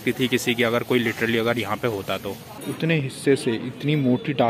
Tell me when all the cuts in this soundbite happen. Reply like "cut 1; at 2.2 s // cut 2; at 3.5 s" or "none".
cut 1; at 2.4 s